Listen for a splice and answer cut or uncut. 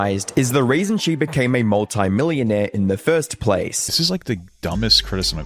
cut